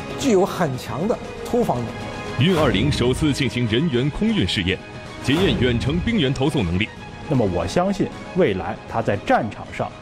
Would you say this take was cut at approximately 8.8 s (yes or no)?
no